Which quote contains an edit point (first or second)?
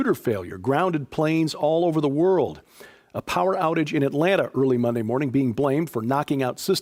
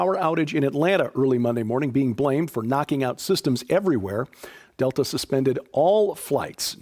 second